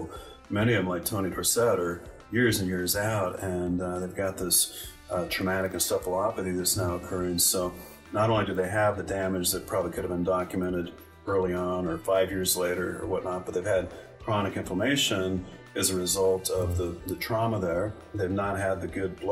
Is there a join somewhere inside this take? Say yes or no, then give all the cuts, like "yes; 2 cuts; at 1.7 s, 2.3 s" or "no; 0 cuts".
no; 0 cuts